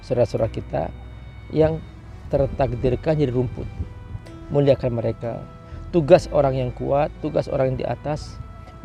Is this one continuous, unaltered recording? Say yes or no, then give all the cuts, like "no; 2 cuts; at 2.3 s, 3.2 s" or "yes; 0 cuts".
yes; 0 cuts